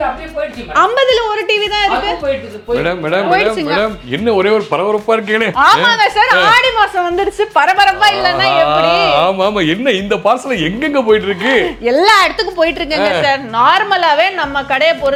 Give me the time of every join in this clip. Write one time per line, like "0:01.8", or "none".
none